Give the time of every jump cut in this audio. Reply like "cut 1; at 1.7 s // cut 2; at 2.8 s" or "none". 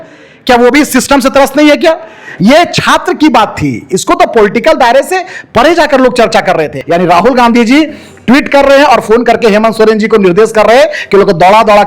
cut 1; at 6.8 s